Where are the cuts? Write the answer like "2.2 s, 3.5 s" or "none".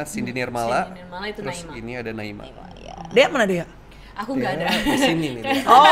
none